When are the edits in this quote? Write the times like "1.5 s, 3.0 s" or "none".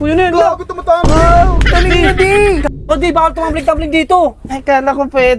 none